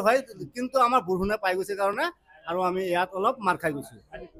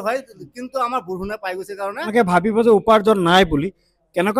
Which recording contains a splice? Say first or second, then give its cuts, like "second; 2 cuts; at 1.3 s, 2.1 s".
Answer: second; 1 cut; at 2.0 s